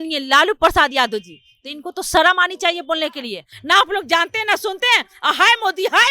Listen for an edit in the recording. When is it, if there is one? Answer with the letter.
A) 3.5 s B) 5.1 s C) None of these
A